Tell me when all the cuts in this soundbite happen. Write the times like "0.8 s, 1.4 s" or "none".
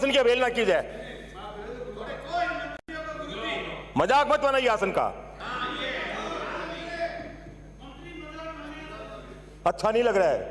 none